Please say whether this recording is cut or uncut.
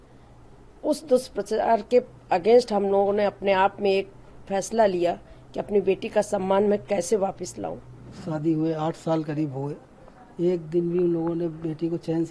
cut